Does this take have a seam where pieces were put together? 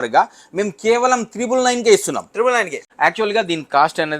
yes; 1 cut; at 2.8 s

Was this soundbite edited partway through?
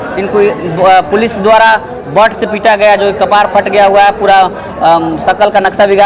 no; 0 cuts

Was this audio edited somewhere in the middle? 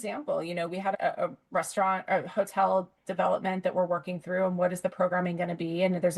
yes; 1 cut; at 0.9 s

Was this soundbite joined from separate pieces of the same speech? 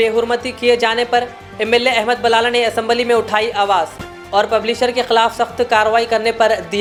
no; 0 cuts

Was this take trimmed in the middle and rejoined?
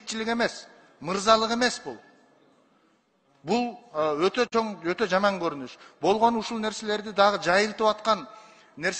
no; 0 cuts

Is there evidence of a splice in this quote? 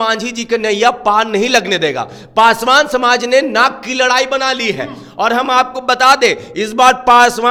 no; 0 cuts

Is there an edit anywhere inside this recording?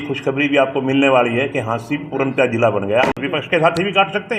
yes; 1 cut; at 3.2 s

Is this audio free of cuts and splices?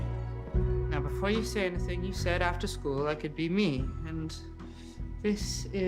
no; 1 cut; at 2.4 s

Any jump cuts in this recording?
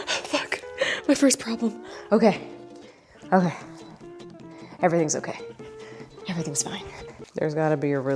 no; 0 cuts

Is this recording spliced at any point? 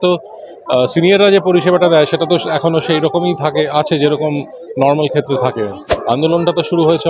yes; 1 cut; at 5.8 s

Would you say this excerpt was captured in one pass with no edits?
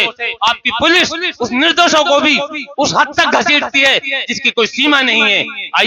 yes; 0 cuts

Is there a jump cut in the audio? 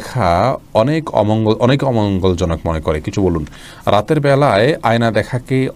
no; 0 cuts

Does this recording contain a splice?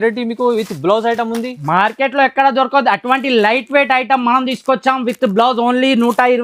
no; 0 cuts

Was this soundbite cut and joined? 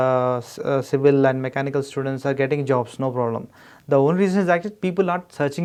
no; 0 cuts

